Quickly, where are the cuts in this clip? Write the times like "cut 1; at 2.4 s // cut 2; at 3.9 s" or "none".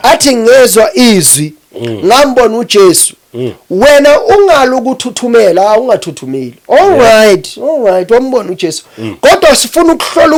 none